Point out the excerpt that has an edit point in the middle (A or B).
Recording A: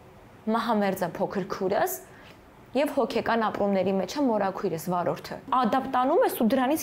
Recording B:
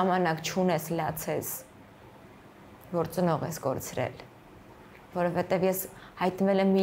A